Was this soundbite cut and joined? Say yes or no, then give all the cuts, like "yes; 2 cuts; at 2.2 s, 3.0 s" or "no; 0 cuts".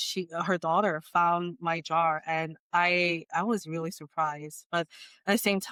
no; 0 cuts